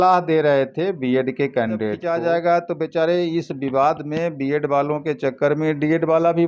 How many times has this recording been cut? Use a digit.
1